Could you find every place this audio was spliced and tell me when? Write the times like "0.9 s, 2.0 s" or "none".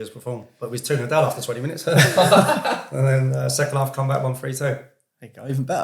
none